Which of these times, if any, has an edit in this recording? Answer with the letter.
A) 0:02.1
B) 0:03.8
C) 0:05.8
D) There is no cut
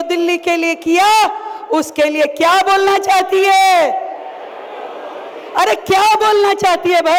D